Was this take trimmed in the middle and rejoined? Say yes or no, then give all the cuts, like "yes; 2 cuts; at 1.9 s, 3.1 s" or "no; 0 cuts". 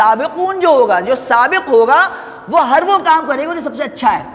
no; 0 cuts